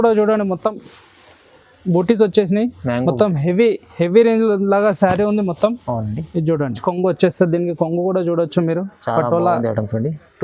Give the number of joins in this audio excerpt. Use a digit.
1